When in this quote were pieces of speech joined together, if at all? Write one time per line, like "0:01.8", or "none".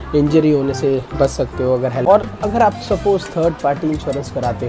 0:02.0

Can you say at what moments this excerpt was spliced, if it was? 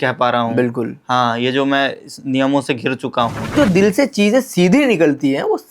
0:03.6

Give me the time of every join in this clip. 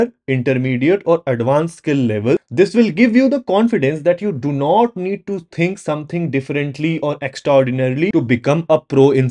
0:02.5
0:08.1

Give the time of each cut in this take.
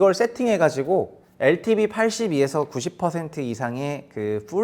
0:01.2

